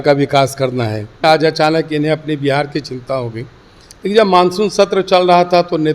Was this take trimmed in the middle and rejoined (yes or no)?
yes